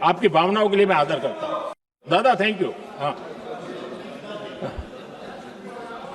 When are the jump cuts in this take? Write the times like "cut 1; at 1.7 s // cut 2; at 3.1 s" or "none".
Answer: cut 1; at 2.0 s